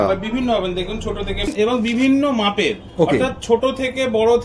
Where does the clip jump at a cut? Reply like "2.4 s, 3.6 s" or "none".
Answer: 1.5 s